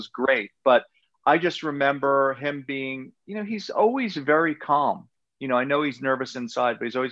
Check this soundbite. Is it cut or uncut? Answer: uncut